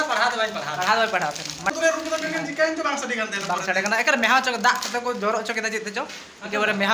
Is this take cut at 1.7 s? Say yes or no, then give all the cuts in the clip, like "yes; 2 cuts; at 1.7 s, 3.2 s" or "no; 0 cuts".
yes; 1 cut; at 1.7 s